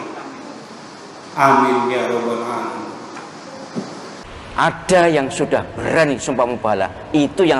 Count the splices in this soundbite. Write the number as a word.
one